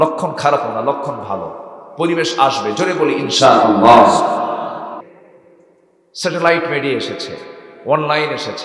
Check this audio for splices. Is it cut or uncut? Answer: cut